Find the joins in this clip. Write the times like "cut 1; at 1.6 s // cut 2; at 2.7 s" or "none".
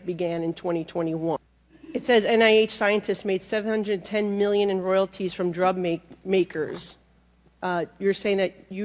cut 1; at 1.4 s